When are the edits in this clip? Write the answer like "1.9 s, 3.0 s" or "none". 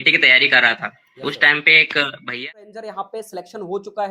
2.4 s